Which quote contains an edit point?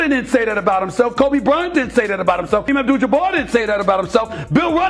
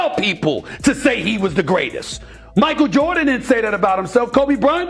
first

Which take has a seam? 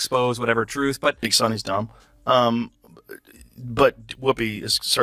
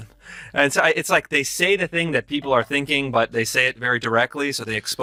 first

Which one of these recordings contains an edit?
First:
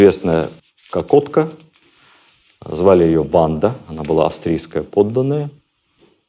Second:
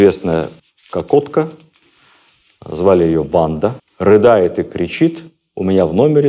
second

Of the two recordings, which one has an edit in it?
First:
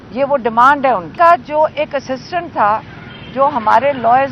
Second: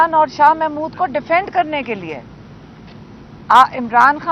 first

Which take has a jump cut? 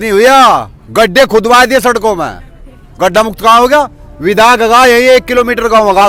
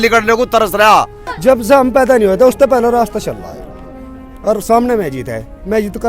second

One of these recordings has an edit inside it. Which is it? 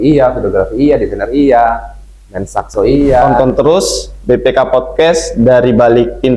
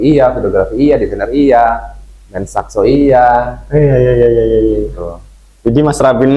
first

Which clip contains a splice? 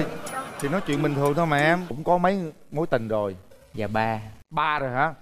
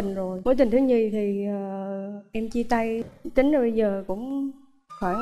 first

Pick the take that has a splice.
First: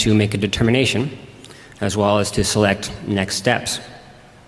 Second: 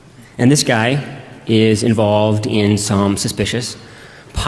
second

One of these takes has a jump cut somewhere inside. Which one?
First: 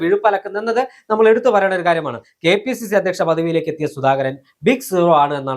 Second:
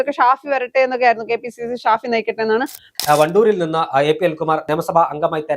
second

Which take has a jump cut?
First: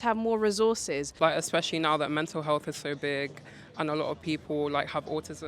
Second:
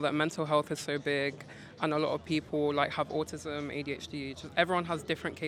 first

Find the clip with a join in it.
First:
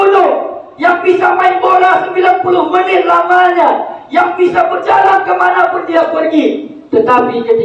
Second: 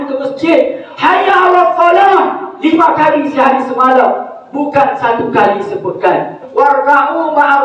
second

